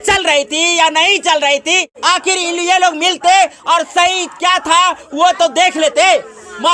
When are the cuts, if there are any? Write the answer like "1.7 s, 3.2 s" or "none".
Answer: 1.9 s